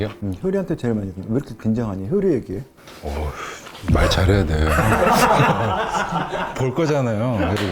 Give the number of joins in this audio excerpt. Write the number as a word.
zero